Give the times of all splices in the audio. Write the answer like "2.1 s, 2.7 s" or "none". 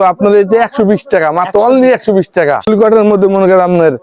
2.7 s

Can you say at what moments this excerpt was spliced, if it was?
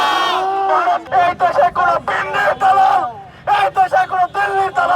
1.0 s

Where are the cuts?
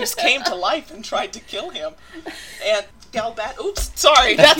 3.0 s

